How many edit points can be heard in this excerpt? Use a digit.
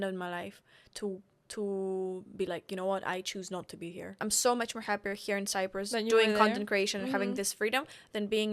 1